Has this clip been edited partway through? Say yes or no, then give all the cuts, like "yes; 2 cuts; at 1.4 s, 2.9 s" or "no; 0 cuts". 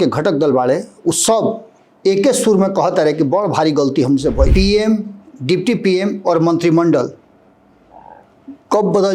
yes; 1 cut; at 4.5 s